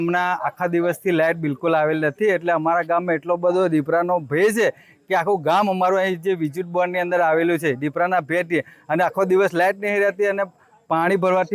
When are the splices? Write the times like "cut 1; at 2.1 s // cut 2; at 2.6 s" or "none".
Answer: none